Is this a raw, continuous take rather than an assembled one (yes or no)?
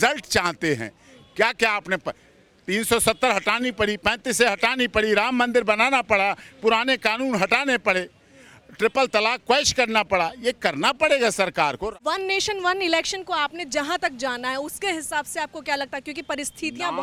yes